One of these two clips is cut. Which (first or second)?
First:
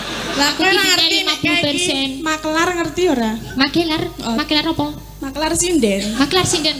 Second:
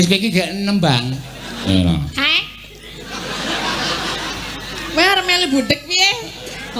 second